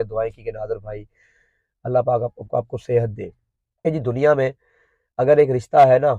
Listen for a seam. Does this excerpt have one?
yes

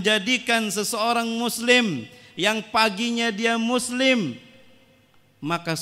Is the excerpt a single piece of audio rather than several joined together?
yes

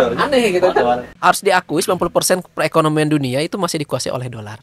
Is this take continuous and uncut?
no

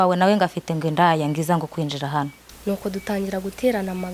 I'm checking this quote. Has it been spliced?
yes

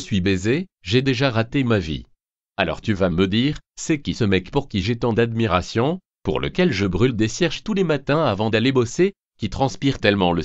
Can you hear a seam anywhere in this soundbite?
yes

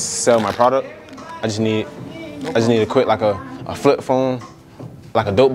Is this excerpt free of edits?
yes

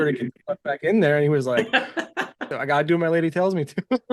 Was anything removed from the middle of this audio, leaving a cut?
yes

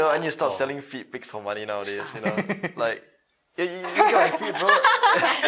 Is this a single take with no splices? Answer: yes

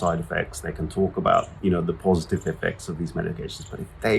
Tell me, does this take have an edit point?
yes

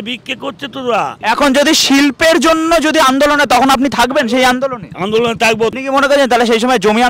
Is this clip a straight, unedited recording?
no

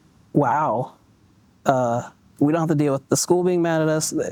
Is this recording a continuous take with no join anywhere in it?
yes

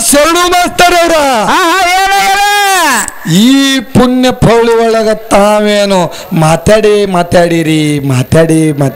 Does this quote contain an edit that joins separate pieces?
no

